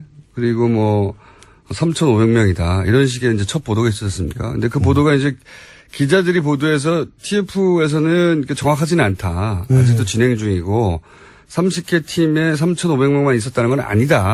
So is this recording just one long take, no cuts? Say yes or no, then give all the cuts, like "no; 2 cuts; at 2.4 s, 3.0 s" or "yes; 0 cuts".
yes; 0 cuts